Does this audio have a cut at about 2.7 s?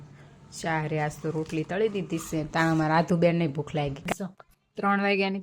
yes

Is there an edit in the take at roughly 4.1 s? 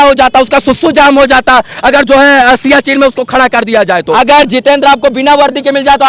yes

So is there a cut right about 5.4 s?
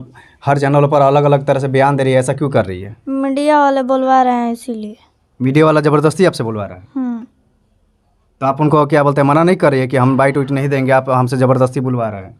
no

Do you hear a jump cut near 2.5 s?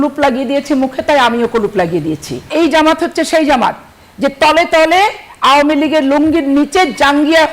yes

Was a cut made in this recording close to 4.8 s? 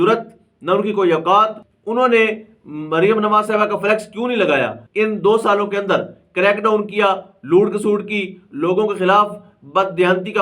yes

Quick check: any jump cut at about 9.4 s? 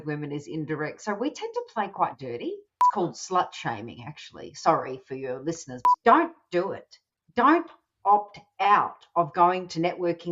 no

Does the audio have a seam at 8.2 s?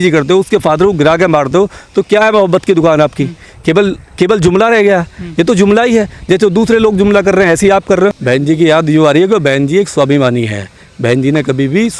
yes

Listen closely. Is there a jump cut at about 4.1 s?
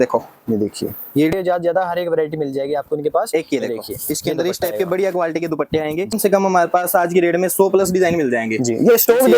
no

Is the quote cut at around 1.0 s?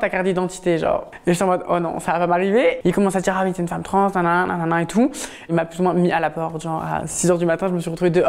no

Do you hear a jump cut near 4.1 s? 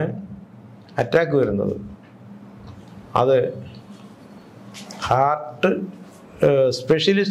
no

